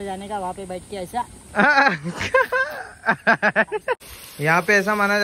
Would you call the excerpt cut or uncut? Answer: cut